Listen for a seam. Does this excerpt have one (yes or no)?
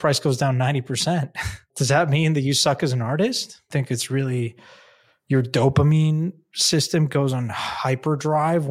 yes